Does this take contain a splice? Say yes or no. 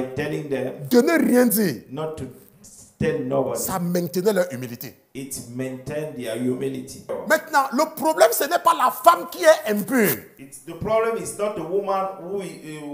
yes